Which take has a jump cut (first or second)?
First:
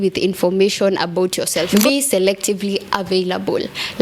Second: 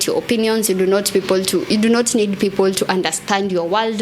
first